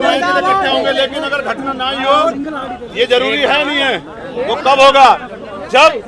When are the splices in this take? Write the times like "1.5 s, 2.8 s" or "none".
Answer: none